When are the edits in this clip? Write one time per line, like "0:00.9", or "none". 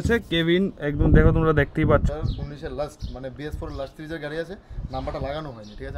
0:02.0